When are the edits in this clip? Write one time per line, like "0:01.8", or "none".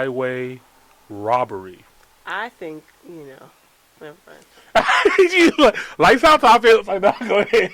0:02.9